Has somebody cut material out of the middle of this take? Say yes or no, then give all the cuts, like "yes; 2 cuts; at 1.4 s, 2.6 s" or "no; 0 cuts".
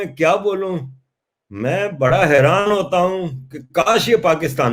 no; 0 cuts